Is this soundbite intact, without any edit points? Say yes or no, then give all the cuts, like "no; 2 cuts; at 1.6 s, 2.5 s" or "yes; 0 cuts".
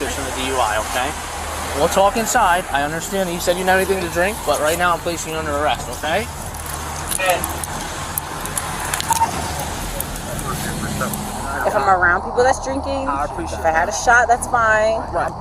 no; 1 cut; at 1.1 s